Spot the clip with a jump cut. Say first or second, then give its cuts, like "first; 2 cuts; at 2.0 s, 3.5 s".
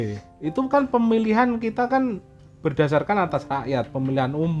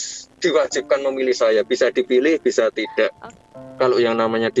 second; 1 cut; at 3.4 s